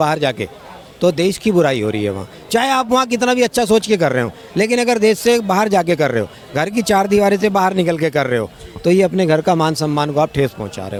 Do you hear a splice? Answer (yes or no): no